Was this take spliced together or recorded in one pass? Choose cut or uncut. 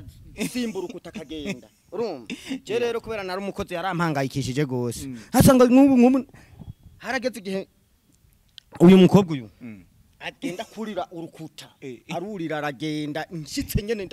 uncut